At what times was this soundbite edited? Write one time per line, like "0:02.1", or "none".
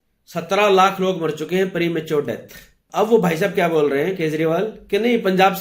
0:02.8